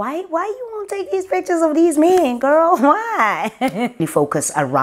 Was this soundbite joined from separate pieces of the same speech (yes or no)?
yes